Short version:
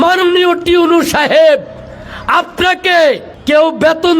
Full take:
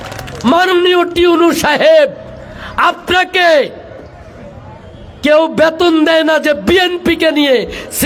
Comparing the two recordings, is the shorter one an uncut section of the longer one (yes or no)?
no